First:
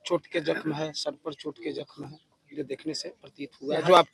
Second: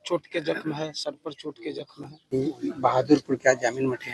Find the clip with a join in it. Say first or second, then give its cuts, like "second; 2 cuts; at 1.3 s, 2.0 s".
second; 1 cut; at 2.4 s